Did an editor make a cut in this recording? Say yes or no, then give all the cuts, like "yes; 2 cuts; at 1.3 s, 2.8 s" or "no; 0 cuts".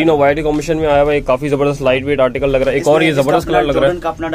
no; 0 cuts